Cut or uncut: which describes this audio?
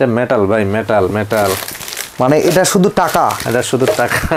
uncut